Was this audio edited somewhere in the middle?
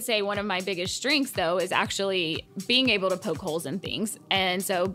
yes; 1 cut; at 2.5 s

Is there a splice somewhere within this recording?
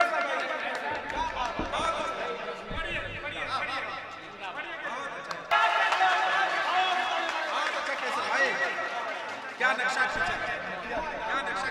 yes; 1 cut; at 5.5 s

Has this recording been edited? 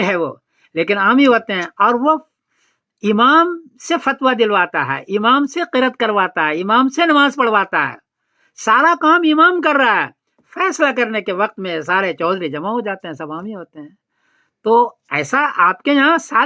no; 0 cuts

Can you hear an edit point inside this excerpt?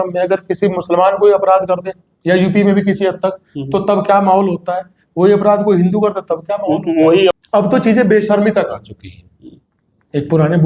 yes; 1 cut; at 7.4 s

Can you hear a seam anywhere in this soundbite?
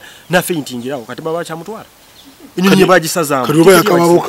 no; 0 cuts

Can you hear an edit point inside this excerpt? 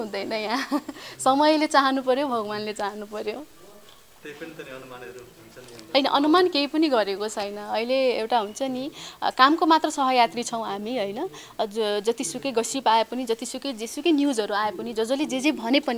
no; 0 cuts

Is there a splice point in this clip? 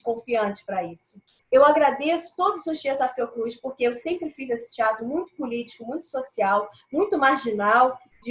yes; 1 cut; at 1.3 s

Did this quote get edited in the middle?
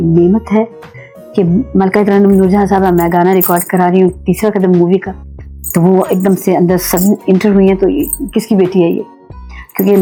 no; 0 cuts

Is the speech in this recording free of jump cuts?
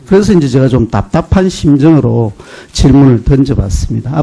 yes; 0 cuts

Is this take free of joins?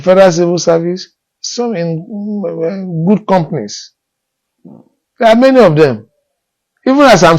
yes; 0 cuts

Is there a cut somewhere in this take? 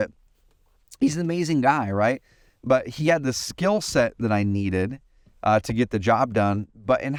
no; 0 cuts

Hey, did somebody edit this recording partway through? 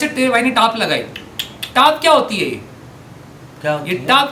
no; 0 cuts

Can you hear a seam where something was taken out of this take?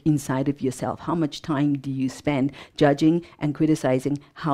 no; 0 cuts

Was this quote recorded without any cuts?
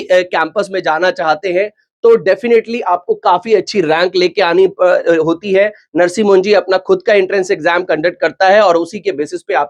yes; 0 cuts

